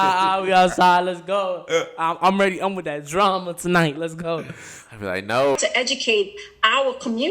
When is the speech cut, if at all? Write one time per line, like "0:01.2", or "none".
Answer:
0:05.6